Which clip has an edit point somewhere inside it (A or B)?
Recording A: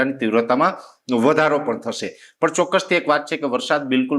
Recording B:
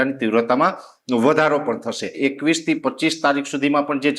B